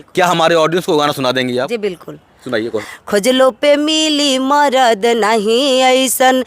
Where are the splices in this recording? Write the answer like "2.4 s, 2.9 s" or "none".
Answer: 2.8 s